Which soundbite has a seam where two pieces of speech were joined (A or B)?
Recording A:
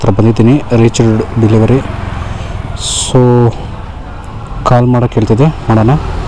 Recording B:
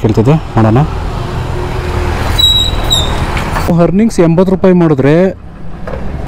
B